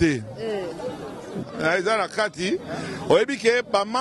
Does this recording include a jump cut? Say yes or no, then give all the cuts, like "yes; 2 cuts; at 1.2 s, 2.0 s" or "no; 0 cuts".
yes; 1 cut; at 1.3 s